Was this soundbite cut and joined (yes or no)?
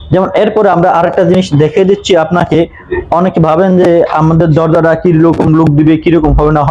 no